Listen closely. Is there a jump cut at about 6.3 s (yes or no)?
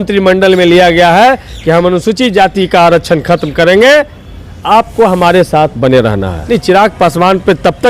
yes